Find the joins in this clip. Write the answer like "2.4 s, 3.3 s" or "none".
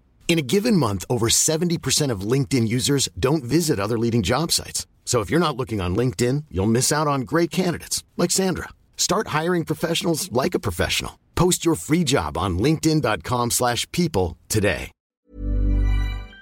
15.0 s